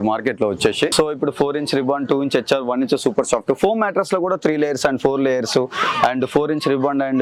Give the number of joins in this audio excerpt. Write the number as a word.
zero